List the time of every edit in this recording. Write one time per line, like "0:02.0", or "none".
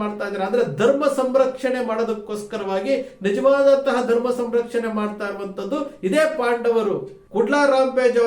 0:07.2